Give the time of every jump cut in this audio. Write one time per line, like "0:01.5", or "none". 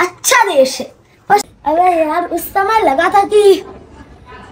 0:01.4